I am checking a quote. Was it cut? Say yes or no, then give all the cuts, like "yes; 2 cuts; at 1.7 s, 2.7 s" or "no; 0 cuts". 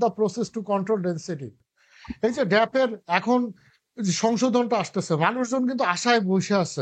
yes; 1 cut; at 1.5 s